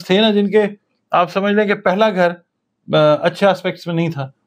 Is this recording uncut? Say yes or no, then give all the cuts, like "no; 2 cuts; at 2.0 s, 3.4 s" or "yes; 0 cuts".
yes; 0 cuts